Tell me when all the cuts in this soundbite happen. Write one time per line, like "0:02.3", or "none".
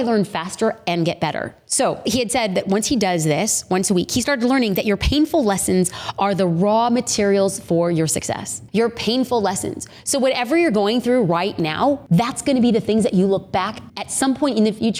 none